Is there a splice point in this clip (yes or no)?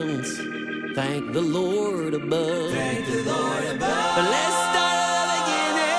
no